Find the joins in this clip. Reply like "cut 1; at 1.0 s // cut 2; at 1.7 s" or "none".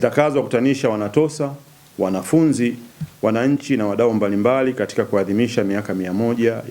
none

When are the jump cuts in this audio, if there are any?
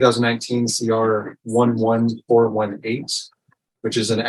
none

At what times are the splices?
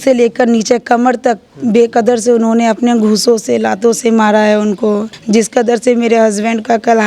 cut 1; at 5.1 s

